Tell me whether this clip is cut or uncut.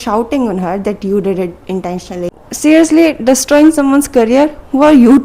cut